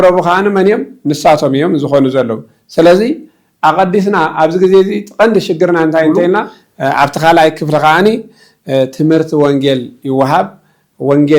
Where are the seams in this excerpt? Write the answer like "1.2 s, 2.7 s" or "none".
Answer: 6.6 s